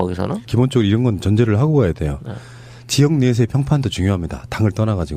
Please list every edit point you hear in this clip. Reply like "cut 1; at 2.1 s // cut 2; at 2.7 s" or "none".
cut 1; at 2.1 s

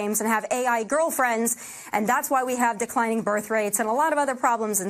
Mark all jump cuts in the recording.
none

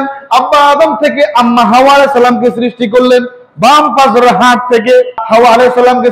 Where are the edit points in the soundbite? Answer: cut 1; at 5.2 s

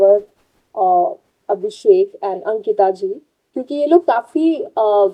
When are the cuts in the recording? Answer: none

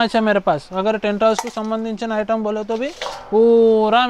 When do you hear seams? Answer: none

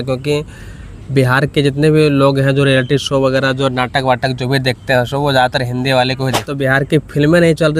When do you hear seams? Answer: cut 1; at 6.5 s

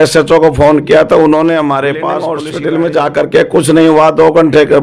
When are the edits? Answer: cut 1; at 2.3 s

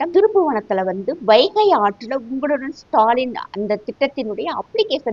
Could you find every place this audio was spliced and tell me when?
none

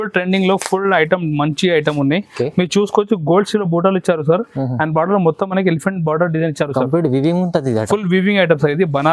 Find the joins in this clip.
none

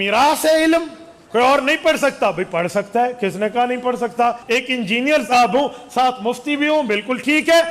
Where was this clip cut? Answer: cut 1; at 1.2 s // cut 2; at 4.4 s

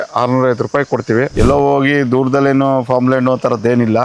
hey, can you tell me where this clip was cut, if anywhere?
cut 1; at 1.3 s

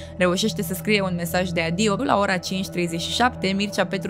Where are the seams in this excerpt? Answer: cut 1; at 2.0 s

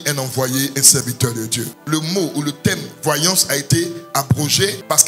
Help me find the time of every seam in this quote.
cut 1; at 1.7 s

